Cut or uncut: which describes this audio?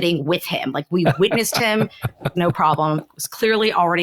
uncut